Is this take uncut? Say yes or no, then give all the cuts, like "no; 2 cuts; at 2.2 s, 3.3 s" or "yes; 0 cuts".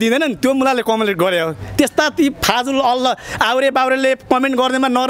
yes; 0 cuts